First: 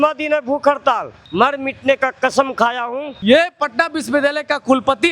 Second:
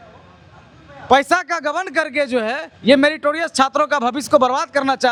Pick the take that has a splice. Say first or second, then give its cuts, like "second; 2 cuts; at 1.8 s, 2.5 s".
first; 2 cuts; at 1.2 s, 3.1 s